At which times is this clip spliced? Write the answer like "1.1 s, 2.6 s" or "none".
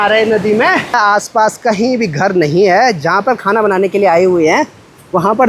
0.9 s